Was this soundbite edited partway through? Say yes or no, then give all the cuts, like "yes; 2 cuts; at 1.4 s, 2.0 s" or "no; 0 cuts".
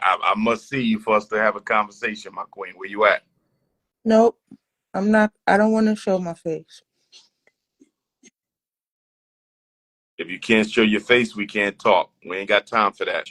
no; 0 cuts